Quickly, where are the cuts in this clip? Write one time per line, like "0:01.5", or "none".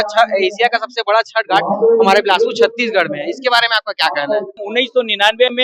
0:04.6